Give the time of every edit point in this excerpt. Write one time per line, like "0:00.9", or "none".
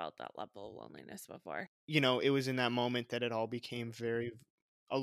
0:01.8